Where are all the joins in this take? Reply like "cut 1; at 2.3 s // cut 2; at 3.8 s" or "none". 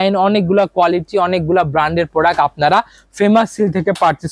none